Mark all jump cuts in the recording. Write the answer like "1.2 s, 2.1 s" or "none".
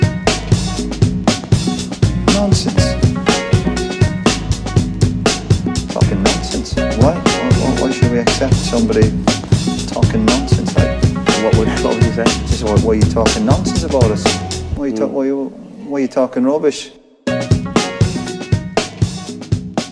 none

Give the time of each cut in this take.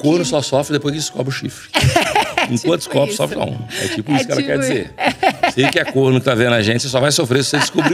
none

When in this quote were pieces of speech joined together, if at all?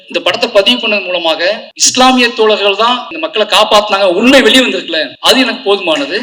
1.7 s, 3.2 s, 5.1 s

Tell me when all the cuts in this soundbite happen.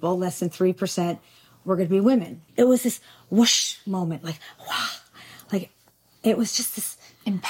2.4 s

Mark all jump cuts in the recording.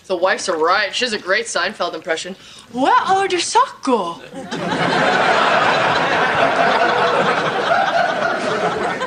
5.4 s

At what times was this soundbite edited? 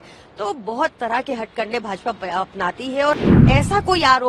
3.3 s

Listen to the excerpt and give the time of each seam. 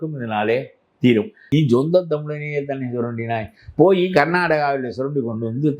1.4 s

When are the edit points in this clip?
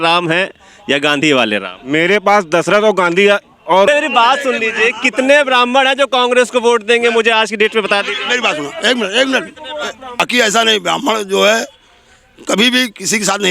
3.9 s, 10.2 s

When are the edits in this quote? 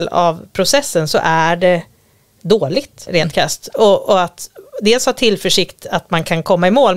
3.1 s

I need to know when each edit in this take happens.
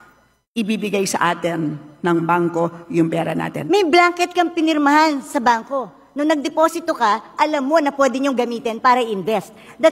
3.6 s

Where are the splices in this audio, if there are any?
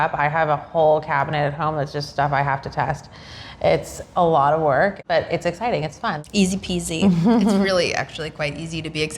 5.0 s, 6.2 s

